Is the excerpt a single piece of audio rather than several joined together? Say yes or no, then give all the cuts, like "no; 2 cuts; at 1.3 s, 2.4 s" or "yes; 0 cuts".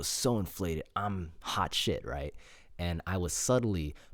yes; 0 cuts